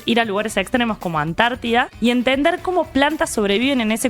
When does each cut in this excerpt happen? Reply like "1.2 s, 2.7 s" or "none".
1.9 s